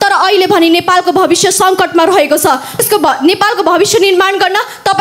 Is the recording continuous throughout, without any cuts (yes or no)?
no